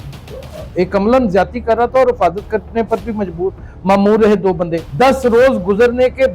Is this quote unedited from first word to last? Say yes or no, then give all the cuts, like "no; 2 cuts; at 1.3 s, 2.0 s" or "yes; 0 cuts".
no; 1 cut; at 4.8 s